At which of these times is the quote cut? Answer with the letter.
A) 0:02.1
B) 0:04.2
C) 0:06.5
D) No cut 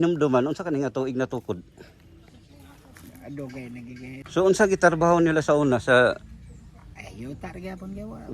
B